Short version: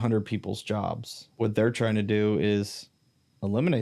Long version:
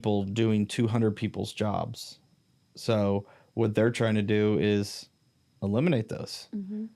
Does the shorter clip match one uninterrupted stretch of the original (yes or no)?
no